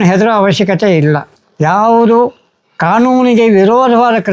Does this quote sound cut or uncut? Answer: cut